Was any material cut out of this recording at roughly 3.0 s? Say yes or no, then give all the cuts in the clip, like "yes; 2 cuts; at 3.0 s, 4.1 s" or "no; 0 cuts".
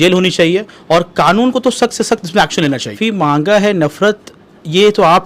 yes; 1 cut; at 3.0 s